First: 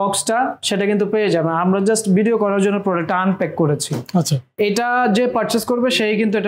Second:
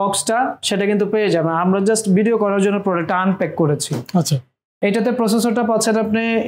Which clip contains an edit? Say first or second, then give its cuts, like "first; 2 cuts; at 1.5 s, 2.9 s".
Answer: first; 1 cut; at 4.5 s